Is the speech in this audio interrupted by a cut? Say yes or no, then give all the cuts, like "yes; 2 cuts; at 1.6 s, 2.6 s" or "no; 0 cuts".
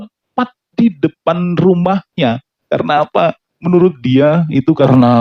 no; 0 cuts